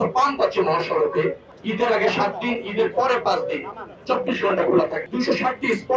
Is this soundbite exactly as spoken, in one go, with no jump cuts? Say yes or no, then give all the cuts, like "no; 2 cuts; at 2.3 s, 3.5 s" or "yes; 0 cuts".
no; 2 cuts; at 1.5 s, 5.0 s